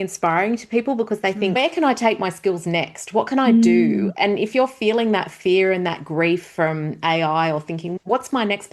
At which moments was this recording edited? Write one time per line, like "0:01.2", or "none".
0:01.6
0:07.9